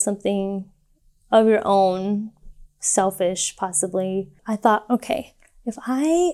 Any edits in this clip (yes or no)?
yes